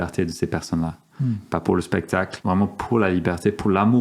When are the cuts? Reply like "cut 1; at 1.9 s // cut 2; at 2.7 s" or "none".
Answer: cut 1; at 2.3 s